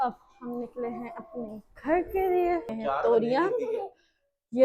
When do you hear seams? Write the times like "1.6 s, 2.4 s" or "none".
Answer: 2.7 s